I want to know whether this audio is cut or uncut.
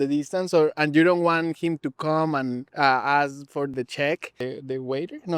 cut